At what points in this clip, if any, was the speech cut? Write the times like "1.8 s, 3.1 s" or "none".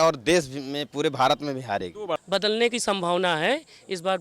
2.2 s